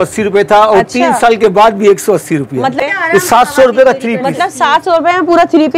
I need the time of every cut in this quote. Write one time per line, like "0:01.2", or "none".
0:02.8